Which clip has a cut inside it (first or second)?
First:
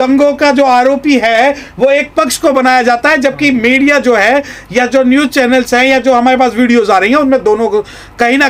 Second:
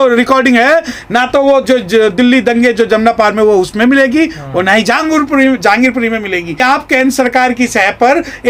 second